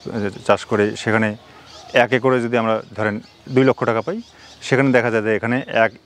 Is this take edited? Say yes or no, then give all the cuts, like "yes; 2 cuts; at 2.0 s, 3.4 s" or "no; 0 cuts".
no; 0 cuts